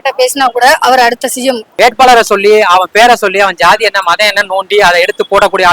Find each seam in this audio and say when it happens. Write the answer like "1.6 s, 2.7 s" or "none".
1.7 s

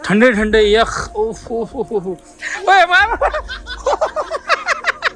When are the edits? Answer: 2.5 s

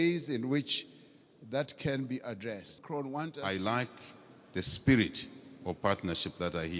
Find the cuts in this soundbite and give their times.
3.4 s

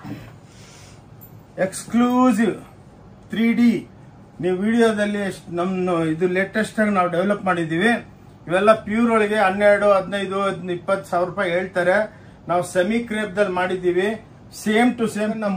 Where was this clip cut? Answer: none

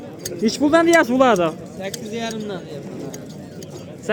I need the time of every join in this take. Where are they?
none

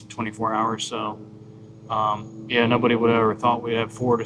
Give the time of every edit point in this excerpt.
none

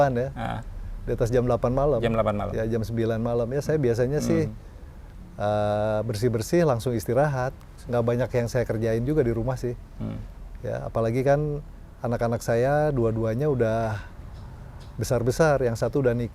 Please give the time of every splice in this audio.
none

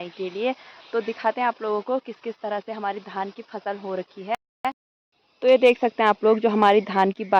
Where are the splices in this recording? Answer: none

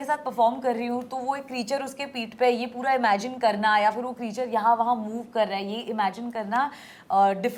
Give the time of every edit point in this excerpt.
none

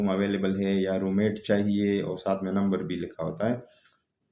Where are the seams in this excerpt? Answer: none

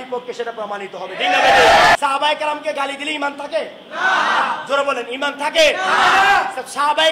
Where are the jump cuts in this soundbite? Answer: 2.0 s

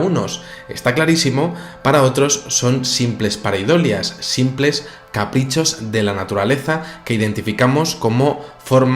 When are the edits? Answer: 3.9 s

